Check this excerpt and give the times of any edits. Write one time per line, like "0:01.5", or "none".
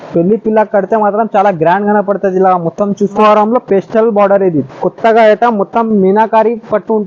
0:03.2